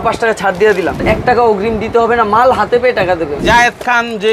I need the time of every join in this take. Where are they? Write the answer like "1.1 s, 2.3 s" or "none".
1.0 s, 3.4 s

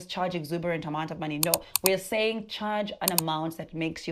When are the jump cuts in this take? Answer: none

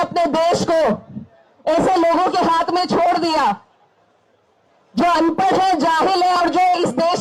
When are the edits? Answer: none

